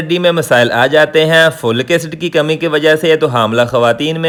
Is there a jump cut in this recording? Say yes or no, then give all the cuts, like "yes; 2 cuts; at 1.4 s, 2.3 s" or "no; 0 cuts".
no; 0 cuts